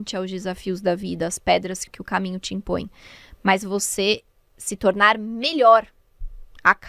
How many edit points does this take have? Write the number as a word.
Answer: one